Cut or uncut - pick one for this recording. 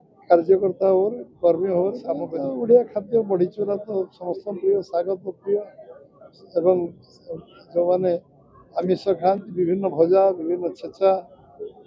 cut